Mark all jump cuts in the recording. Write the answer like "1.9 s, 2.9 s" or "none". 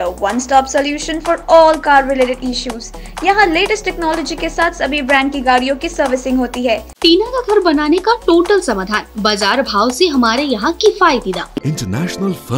6.9 s, 11.6 s

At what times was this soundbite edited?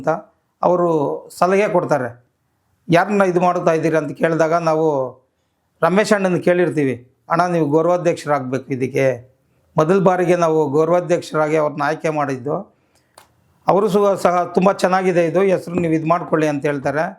none

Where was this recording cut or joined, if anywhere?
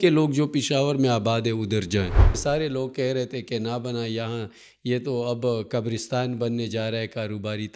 2.3 s

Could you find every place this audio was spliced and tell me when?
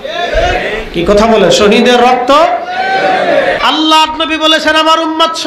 3.6 s

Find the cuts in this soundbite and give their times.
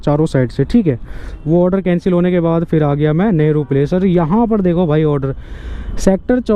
1.2 s

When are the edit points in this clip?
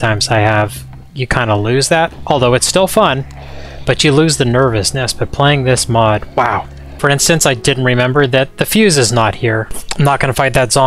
6.8 s, 9.8 s

